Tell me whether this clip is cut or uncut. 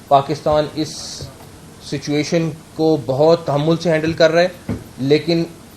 uncut